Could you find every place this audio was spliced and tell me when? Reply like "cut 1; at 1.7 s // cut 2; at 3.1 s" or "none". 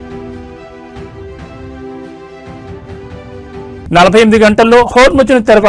none